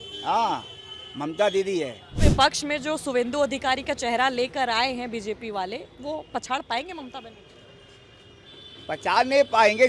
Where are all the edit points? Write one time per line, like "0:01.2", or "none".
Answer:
0:02.0